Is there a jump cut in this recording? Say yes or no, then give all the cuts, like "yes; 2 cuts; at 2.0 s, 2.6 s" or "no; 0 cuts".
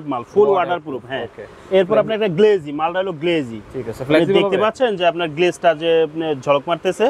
no; 0 cuts